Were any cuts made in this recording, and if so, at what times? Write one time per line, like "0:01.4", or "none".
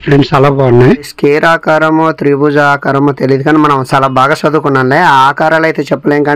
0:01.1